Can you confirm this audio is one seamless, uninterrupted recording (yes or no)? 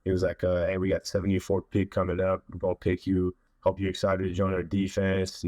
no